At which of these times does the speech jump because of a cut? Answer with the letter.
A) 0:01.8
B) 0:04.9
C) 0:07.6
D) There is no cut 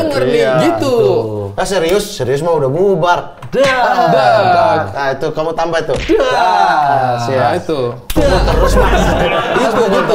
D